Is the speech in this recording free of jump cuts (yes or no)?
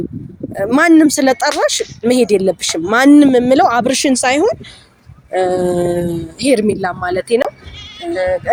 yes